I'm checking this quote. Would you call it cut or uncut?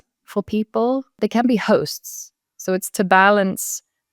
cut